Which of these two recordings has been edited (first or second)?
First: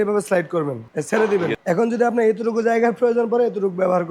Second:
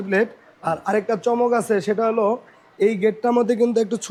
first